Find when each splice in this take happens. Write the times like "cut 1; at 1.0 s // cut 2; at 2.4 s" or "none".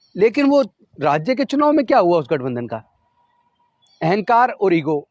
none